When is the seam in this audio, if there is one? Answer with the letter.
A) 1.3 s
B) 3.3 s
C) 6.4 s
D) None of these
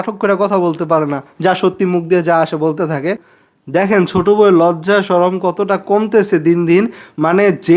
B